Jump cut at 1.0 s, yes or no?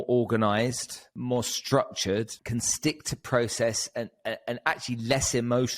yes